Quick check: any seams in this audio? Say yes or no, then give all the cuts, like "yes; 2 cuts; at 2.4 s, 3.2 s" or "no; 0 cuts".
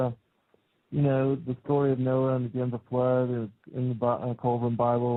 no; 0 cuts